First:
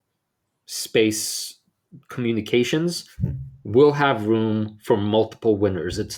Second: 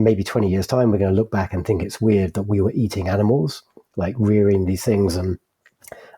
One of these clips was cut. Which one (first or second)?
second